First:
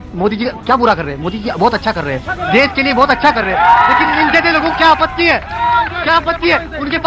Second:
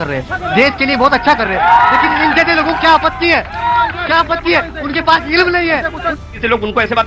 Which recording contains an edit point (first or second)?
second